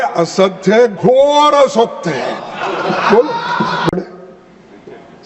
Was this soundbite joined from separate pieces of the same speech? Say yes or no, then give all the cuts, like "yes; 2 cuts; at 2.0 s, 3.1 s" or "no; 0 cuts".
yes; 1 cut; at 3.9 s